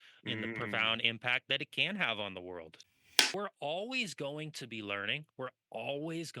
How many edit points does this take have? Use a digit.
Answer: 1